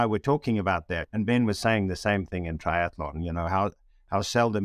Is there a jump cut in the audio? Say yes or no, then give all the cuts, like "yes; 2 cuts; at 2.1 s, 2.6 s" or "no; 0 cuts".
yes; 1 cut; at 1.0 s